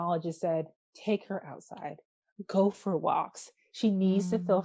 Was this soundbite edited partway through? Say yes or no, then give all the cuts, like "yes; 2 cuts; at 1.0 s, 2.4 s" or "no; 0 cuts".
no; 0 cuts